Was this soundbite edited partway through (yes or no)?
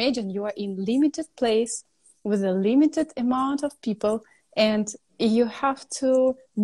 no